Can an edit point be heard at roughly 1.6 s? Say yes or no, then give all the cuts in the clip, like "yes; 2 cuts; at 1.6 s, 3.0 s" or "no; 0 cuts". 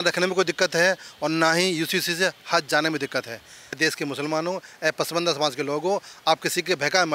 no; 1 cut; at 3.6 s